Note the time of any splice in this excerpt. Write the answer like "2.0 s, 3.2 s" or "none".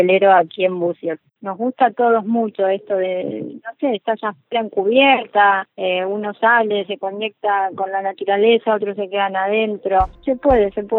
1.2 s

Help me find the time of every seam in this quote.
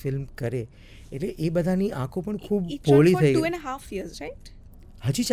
none

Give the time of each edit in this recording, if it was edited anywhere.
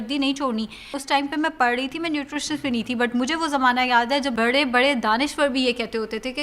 1.0 s, 4.3 s

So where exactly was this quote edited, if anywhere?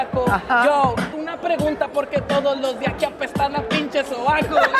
1.2 s

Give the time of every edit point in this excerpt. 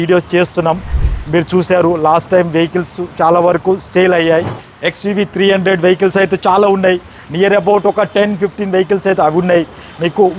4.6 s

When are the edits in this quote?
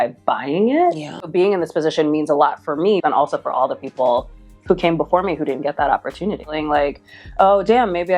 1.3 s, 3.0 s, 6.5 s

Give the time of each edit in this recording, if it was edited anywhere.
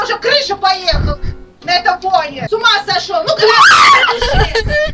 2.4 s

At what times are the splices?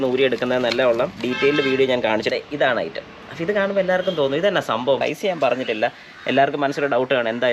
2.3 s, 5.0 s

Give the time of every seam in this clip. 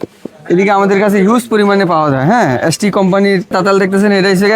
3.5 s

